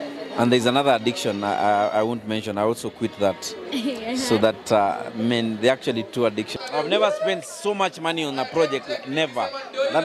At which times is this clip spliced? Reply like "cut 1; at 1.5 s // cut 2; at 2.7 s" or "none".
cut 1; at 6.5 s